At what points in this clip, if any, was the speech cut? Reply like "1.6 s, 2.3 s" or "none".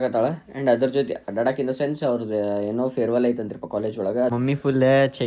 4.3 s